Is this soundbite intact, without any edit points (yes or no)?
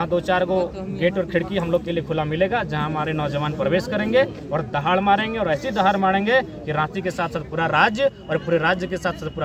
yes